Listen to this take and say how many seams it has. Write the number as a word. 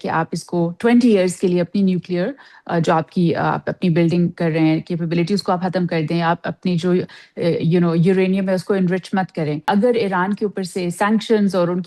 one